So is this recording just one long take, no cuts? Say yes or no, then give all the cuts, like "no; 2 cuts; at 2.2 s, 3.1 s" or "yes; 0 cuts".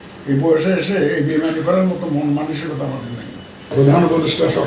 no; 1 cut; at 3.7 s